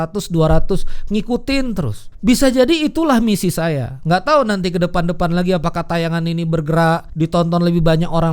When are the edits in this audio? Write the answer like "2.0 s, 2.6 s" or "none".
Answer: 2.0 s, 7.1 s